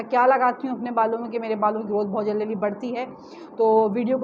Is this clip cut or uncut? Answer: uncut